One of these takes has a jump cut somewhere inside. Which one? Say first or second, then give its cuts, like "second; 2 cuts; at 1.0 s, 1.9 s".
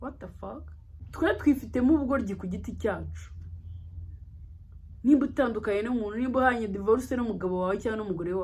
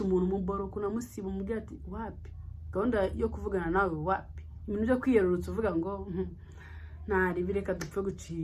first; 1 cut; at 1.1 s